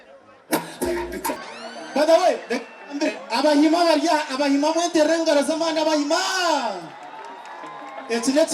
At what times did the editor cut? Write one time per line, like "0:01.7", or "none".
0:01.4